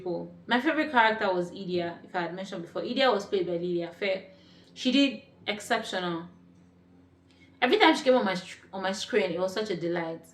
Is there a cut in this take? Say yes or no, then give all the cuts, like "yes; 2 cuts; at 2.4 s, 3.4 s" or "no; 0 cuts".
no; 0 cuts